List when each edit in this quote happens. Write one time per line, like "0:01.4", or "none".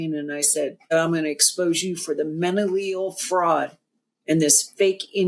0:00.9